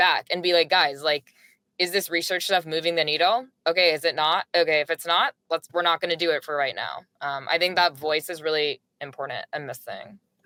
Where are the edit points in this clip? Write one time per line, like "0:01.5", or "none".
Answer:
none